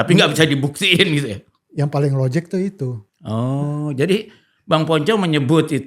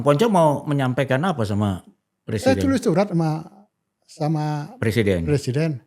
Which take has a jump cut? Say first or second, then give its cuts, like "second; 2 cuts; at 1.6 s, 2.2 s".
first; 1 cut; at 3.1 s